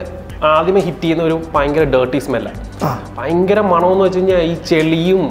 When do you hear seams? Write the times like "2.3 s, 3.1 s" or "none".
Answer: none